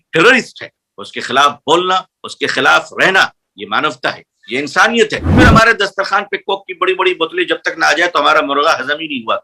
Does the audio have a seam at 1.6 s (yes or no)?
no